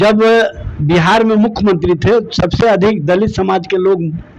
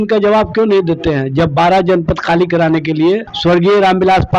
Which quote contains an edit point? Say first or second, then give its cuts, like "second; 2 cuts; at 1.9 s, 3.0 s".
second; 1 cut; at 3.3 s